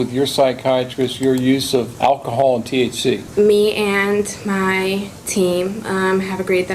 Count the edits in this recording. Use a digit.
2